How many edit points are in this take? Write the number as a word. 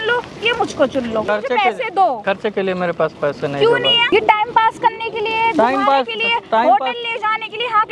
three